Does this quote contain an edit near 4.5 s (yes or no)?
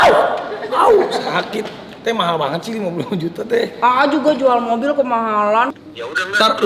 no